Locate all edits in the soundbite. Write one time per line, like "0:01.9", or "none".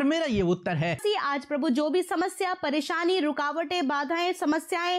0:01.0